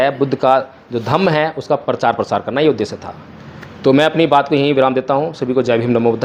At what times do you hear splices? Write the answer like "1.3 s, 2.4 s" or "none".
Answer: none

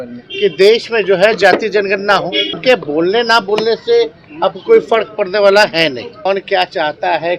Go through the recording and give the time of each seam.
2.6 s, 6.1 s

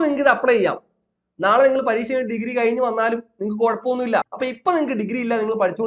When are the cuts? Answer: 4.3 s

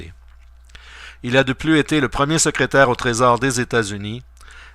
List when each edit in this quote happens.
3.4 s

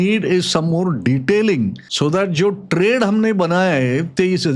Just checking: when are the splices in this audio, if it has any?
1.8 s

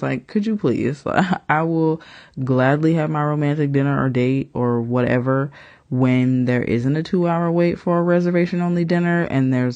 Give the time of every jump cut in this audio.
none

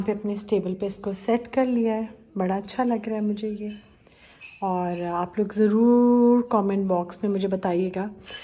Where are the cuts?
none

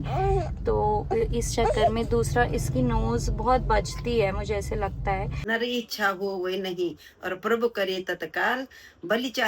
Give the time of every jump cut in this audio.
5.3 s

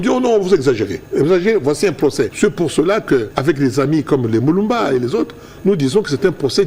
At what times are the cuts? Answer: 1.0 s, 2.3 s, 3.3 s

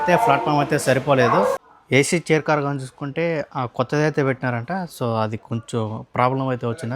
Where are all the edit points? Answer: 1.7 s

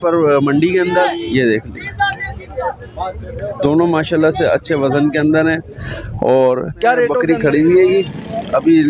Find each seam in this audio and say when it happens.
1.1 s, 7.2 s

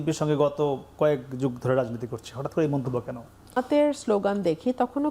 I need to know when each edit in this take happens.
3.6 s

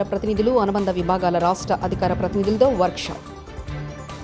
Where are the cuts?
none

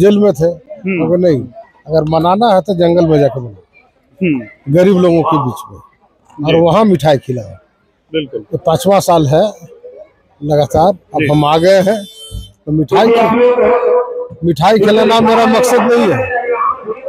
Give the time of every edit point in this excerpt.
none

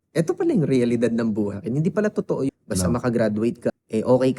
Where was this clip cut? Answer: 1.6 s, 2.5 s, 3.7 s

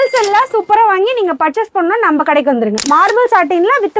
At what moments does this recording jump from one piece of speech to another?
2.8 s

